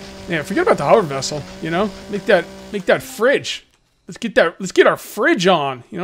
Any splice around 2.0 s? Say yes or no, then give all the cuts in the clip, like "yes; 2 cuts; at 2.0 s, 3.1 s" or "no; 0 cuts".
yes; 1 cut; at 2.0 s